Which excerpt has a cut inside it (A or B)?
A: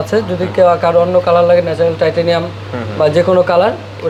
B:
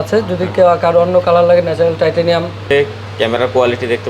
B